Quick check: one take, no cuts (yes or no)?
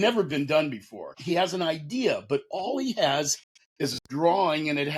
no